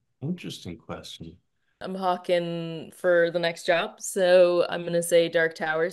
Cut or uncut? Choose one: cut